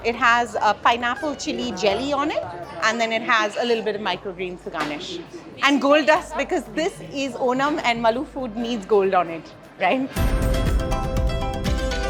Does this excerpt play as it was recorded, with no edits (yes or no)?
yes